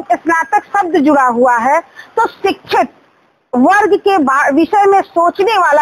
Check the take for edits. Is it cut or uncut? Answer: uncut